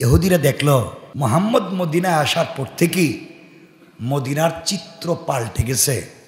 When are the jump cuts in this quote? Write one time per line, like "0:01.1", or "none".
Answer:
0:01.0